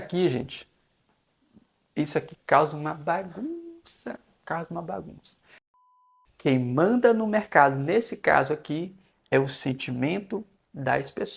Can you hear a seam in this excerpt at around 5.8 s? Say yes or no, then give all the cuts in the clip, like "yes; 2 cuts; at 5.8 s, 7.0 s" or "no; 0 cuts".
yes; 1 cut; at 5.8 s